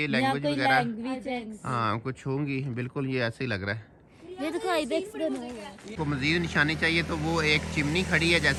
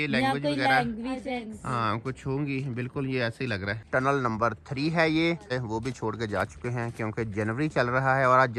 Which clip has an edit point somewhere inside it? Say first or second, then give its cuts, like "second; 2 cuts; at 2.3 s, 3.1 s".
second; 2 cuts; at 3.8 s, 5.5 s